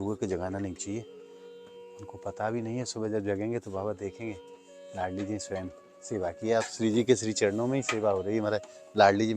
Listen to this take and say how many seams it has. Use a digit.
0